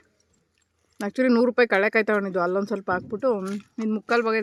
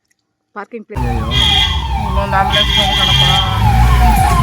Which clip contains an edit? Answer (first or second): second